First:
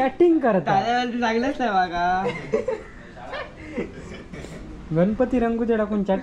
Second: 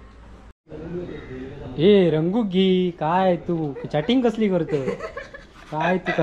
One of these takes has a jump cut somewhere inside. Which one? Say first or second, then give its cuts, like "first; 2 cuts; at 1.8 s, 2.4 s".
second; 1 cut; at 1.0 s